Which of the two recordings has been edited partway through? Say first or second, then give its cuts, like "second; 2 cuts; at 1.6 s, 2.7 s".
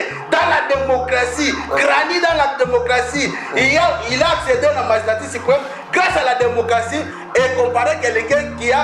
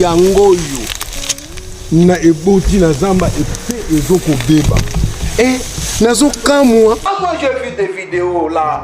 second; 1 cut; at 7.1 s